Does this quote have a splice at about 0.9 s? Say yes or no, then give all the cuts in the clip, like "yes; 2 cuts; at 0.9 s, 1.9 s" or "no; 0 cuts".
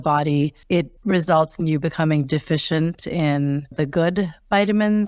yes; 2 cuts; at 0.9 s, 3.7 s